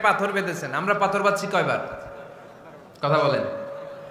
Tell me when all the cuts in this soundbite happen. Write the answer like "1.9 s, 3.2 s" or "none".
none